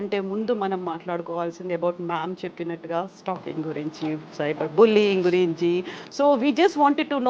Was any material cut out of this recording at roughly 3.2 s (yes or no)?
no